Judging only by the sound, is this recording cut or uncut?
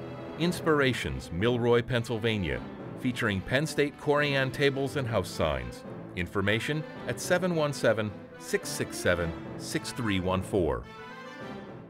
cut